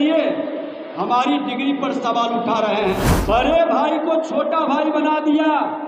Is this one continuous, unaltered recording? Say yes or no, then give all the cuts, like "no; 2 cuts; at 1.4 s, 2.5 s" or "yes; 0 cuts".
no; 1 cut; at 3.1 s